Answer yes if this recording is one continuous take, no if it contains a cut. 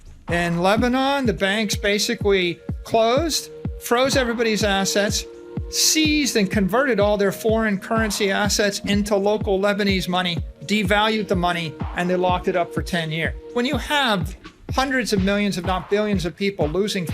no